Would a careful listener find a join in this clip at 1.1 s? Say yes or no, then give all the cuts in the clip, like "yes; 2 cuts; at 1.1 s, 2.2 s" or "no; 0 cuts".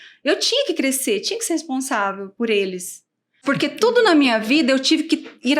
no; 1 cut; at 3.4 s